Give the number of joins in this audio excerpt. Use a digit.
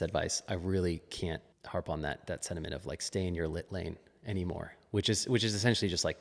1